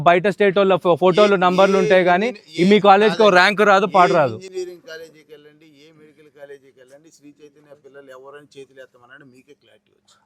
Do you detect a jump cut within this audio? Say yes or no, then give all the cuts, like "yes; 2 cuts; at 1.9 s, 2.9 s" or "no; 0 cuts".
no; 0 cuts